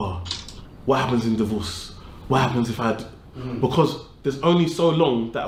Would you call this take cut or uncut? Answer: uncut